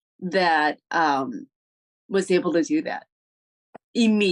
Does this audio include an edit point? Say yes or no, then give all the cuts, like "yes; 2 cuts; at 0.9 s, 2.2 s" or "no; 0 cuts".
no; 0 cuts